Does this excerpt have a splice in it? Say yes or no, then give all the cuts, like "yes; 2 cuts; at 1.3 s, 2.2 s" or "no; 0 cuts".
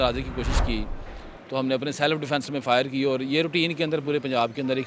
no; 0 cuts